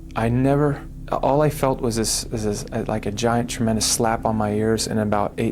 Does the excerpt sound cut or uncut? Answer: cut